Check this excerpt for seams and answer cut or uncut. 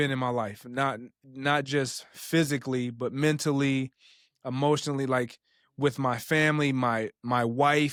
uncut